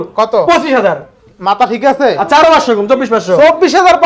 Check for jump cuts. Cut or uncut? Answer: uncut